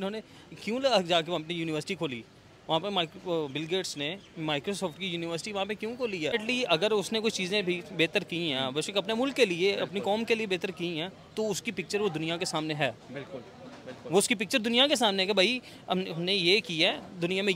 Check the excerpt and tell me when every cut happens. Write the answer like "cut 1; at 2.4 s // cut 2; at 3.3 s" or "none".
cut 1; at 6.3 s